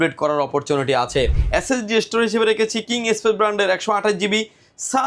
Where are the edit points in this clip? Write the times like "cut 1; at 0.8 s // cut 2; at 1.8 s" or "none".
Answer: cut 1; at 1.4 s